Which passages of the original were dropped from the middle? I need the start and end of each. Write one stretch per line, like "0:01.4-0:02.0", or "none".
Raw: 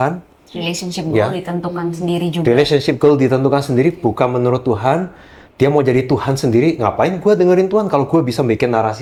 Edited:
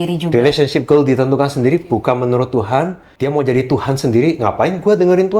0:05.2-0:05.4